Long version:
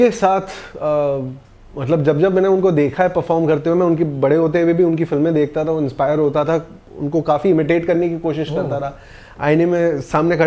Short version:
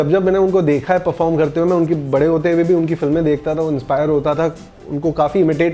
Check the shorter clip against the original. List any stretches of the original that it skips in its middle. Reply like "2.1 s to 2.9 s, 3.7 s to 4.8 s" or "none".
none